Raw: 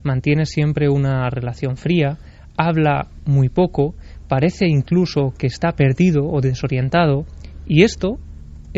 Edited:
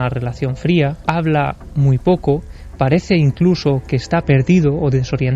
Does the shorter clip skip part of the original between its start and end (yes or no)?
yes